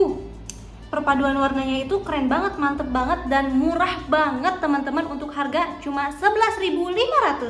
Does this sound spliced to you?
no; 0 cuts

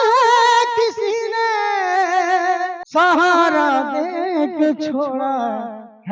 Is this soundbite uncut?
no; 1 cut; at 2.8 s

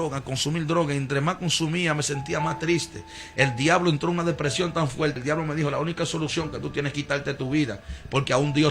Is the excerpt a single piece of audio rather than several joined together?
no; 1 cut; at 5.2 s

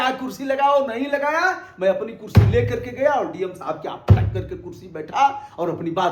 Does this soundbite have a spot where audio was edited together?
no; 0 cuts

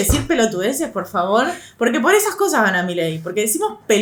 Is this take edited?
no; 0 cuts

